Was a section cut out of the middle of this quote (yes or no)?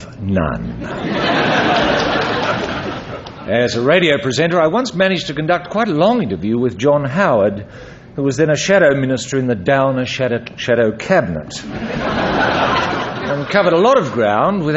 no